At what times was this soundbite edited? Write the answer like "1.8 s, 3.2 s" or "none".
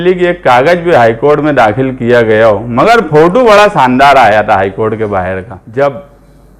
5.5 s

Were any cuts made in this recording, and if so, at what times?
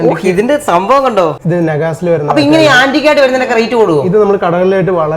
1.4 s

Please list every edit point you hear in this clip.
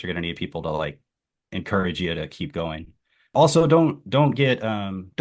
3.3 s

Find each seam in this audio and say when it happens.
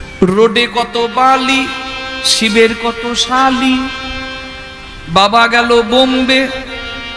none

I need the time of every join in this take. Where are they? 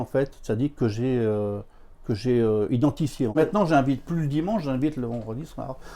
3.4 s

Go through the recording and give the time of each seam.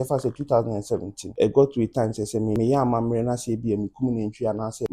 1.2 s, 2.6 s

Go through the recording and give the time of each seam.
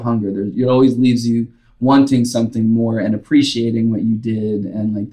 none

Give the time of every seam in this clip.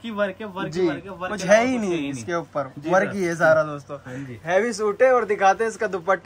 none

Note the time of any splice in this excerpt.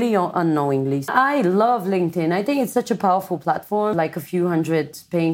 1.1 s, 3.9 s

